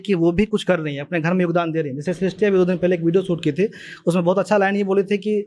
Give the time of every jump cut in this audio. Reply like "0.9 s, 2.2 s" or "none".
none